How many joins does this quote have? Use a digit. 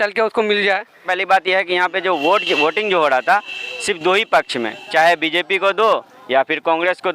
1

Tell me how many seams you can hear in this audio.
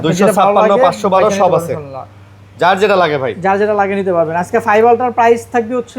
0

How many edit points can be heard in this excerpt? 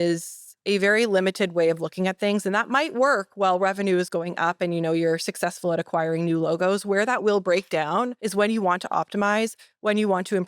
1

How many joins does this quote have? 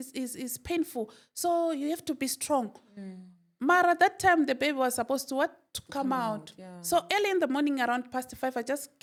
0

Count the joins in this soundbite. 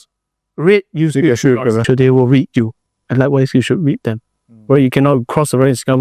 1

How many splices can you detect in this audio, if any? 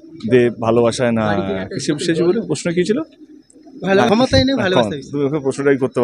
1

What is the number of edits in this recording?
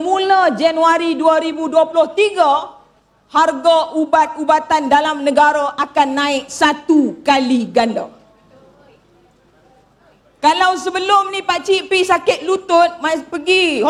0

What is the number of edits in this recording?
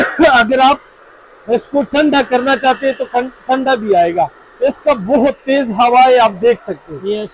0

